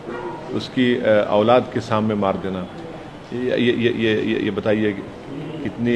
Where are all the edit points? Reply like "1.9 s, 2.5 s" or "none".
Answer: none